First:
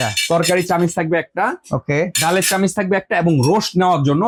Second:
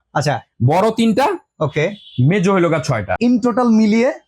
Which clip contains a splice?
second; 1 cut; at 3.2 s

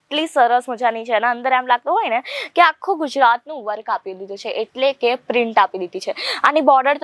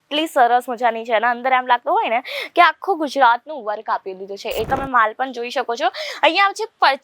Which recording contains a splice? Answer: second; 1 cut; at 4.7 s

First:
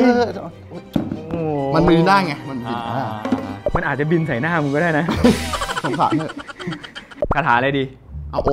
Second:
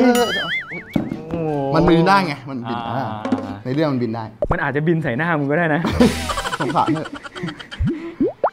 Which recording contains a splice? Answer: first; 2 cuts; at 3.5 s, 7.0 s

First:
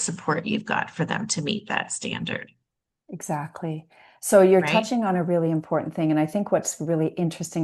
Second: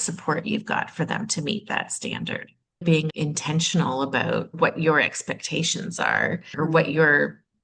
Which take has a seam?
second; 3 cuts; at 3.0 s, 4.5 s, 6.5 s

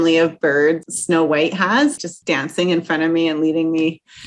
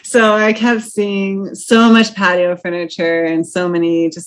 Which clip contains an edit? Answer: first; 2 cuts; at 0.9 s, 2.0 s

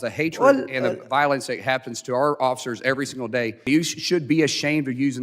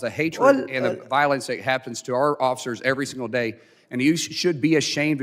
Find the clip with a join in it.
first; 1 cut; at 3.6 s

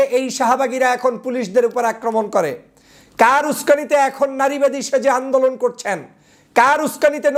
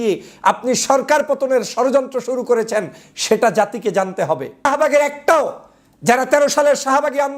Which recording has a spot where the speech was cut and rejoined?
second; 1 cut; at 4.7 s

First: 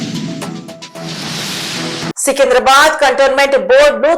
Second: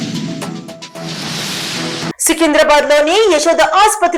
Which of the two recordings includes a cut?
first; 1 cut; at 2.1 s

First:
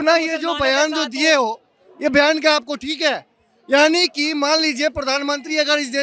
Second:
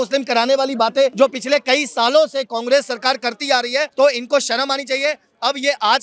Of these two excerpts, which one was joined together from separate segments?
second; 2 cuts; at 1.1 s, 3.9 s

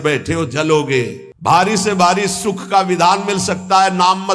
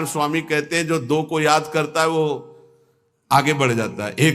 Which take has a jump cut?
first; 1 cut; at 1.2 s

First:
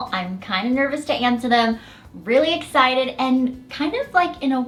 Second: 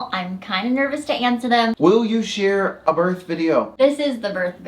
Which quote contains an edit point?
second; 2 cuts; at 1.8 s, 3.7 s

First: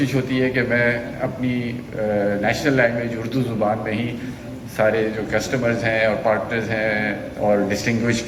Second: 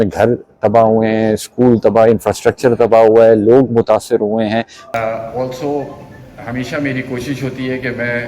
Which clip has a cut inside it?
second; 1 cut; at 4.9 s

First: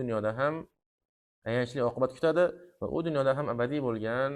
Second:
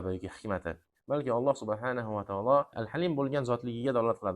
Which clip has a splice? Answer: second; 1 cut; at 2.8 s

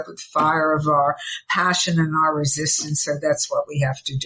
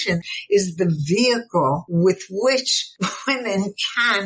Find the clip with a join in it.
second; 2 cuts; at 1.8 s, 2.8 s

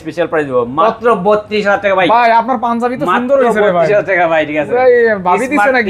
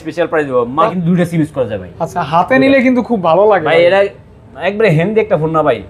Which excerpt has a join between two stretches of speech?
second; 1 cut; at 0.9 s

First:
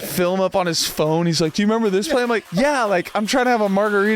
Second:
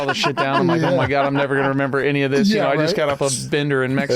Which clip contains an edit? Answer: first; 1 cut; at 2.4 s

